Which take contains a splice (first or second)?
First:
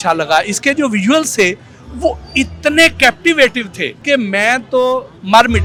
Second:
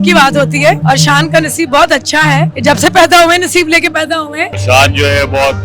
second